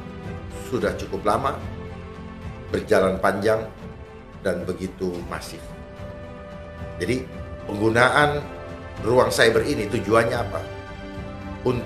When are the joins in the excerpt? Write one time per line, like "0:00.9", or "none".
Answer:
none